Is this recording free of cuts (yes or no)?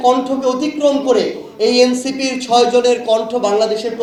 yes